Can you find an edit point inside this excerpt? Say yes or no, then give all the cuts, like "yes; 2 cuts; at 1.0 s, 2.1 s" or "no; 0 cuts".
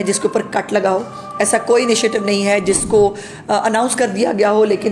no; 0 cuts